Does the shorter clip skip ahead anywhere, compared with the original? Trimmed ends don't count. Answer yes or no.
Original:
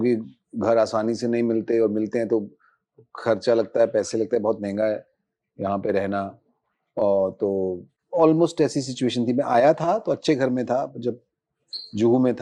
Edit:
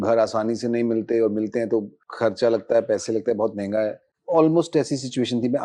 yes